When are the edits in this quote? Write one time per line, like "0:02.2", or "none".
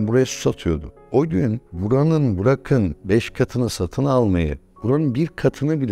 0:00.9

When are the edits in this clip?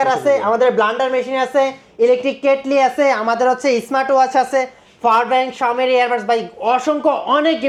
none

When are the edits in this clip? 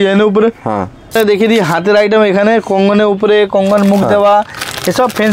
0:01.2

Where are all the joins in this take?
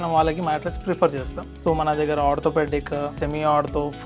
0:01.4
0:03.2

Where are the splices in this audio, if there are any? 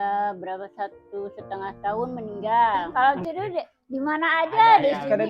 0:02.9

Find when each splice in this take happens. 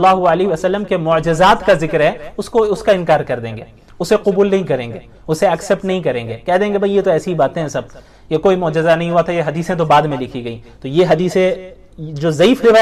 none

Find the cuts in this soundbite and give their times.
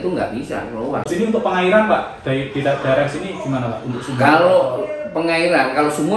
0:01.1

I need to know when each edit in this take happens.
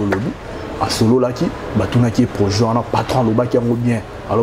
none

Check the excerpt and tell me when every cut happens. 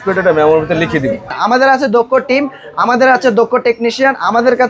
0:01.3

